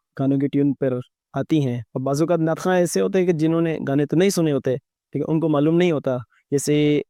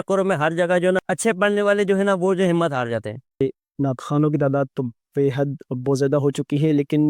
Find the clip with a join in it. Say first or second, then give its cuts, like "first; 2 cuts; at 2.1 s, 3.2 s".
second; 2 cuts; at 1.0 s, 3.4 s